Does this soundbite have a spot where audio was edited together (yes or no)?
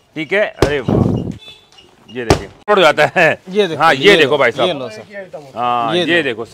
yes